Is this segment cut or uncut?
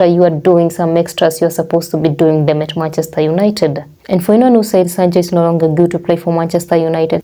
uncut